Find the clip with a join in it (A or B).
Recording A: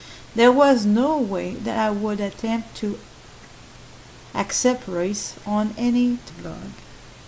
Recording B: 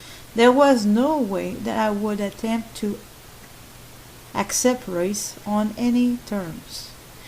B